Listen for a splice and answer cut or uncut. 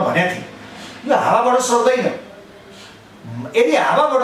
uncut